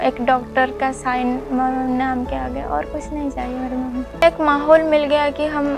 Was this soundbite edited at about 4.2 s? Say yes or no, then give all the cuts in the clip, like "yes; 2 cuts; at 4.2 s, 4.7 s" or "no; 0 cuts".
yes; 1 cut; at 4.2 s